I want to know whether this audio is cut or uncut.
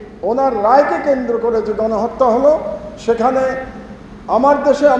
uncut